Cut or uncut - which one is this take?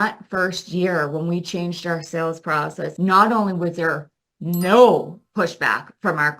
cut